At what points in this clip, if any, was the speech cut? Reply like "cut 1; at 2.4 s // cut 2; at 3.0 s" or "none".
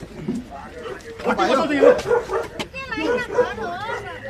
none